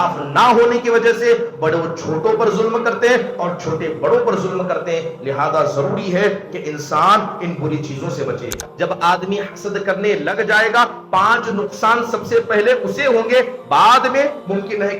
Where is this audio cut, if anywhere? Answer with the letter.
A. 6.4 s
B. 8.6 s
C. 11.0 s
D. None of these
B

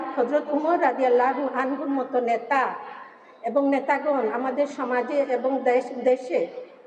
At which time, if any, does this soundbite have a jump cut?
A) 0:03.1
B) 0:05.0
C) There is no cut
C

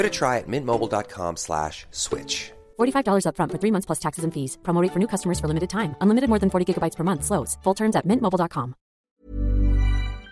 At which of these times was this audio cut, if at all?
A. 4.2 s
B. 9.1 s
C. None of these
B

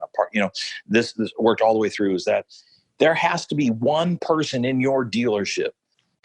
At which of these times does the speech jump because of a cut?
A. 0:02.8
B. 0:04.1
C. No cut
A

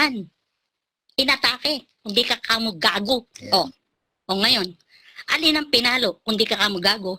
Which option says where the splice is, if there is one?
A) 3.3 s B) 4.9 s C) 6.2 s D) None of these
A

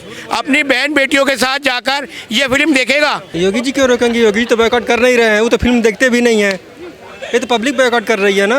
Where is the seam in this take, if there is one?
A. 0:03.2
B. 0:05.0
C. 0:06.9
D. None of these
A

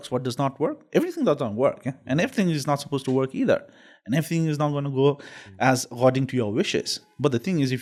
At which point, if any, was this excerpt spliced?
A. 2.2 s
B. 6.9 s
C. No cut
C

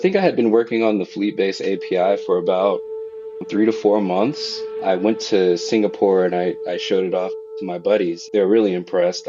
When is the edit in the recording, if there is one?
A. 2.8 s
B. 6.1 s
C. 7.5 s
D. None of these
C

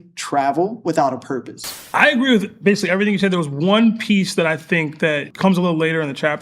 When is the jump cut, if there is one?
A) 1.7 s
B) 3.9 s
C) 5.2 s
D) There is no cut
A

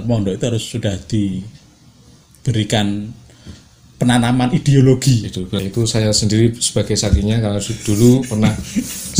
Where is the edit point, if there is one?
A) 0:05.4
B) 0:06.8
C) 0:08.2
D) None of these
A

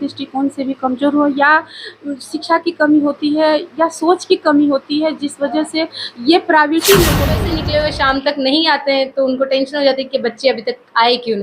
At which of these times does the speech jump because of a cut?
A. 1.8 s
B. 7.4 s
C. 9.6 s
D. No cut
B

